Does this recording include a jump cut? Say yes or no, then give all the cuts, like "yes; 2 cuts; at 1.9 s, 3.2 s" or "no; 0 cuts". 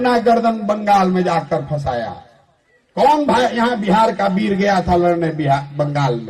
no; 0 cuts